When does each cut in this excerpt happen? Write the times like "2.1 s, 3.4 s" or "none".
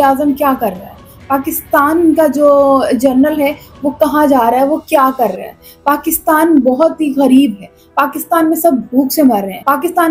none